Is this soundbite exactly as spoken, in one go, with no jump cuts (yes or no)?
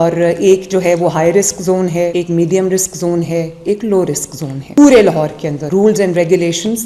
yes